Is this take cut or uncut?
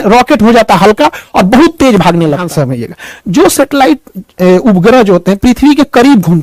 cut